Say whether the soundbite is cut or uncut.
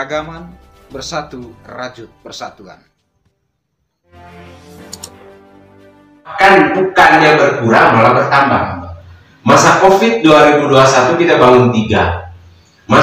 cut